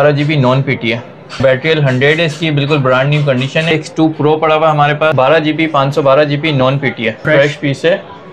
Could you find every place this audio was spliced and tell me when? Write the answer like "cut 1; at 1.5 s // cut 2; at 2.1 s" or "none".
cut 1; at 1.4 s // cut 2; at 3.7 s // cut 3; at 5.1 s // cut 4; at 7.2 s